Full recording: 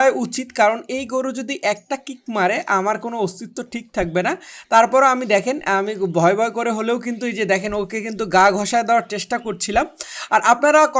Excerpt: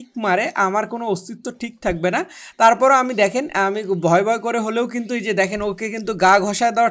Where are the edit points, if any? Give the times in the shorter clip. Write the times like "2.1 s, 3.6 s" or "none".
none